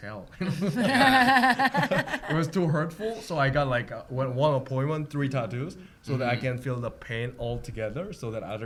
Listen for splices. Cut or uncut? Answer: uncut